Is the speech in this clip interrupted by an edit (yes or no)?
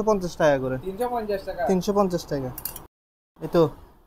no